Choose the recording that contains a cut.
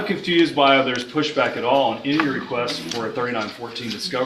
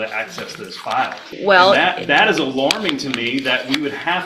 second; 1 cut; at 1.2 s

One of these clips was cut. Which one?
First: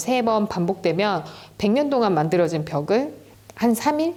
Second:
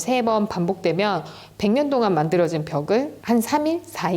second; 1 cut; at 3.1 s

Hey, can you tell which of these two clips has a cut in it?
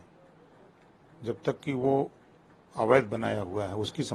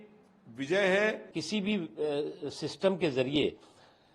second; 1 cut; at 1.4 s

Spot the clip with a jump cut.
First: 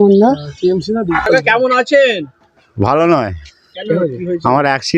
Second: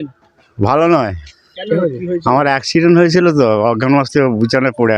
first; 1 cut; at 1.1 s

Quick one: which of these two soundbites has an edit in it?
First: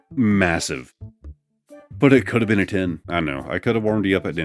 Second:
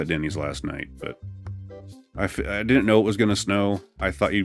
first; 1 cut; at 3.0 s

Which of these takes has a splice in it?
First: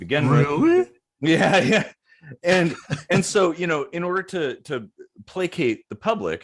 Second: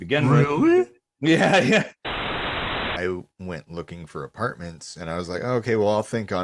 second; 1 cut; at 2.4 s

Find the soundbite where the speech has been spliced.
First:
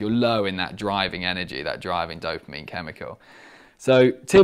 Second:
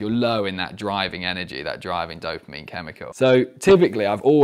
second; 1 cut; at 3.1 s

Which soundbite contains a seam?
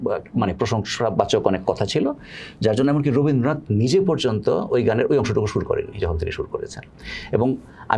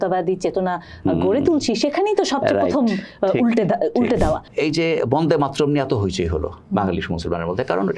second; 1 cut; at 4.5 s

